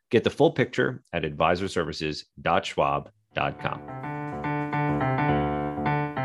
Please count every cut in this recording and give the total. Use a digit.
1